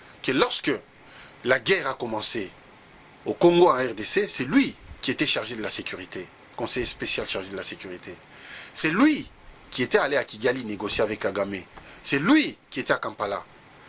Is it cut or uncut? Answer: uncut